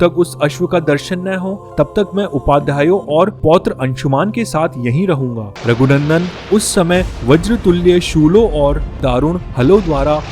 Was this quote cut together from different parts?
yes; 1 cut; at 5.5 s

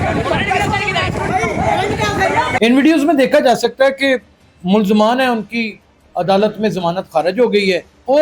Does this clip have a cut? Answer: yes; 1 cut; at 2.6 s

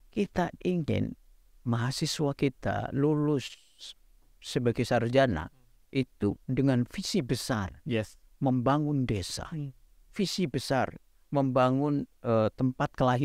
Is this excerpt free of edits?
yes; 0 cuts

